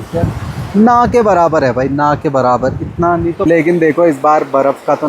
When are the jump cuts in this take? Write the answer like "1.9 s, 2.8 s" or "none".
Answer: 3.5 s

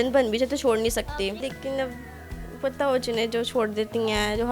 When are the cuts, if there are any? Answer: none

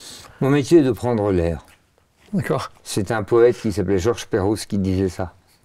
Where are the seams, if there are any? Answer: none

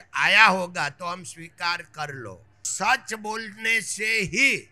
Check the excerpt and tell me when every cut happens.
2.7 s

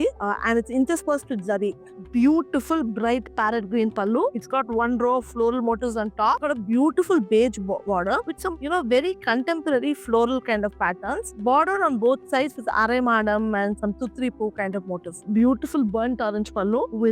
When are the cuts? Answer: 1.9 s, 6.4 s, 15.1 s

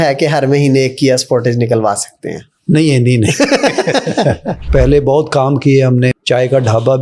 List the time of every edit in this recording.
4.6 s, 6.1 s

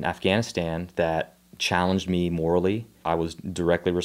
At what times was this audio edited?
2.9 s

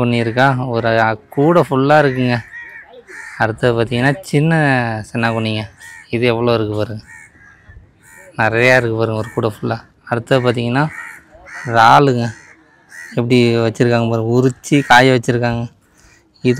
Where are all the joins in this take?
none

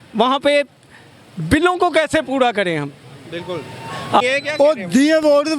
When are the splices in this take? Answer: 4.2 s

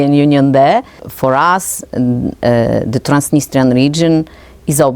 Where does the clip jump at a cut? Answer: 1.0 s

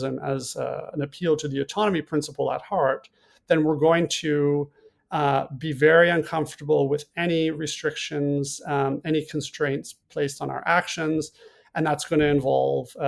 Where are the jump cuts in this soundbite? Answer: none

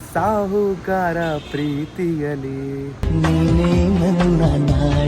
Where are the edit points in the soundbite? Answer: 3.0 s

